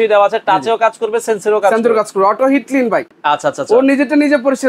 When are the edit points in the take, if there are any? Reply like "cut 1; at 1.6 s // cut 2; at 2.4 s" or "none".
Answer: none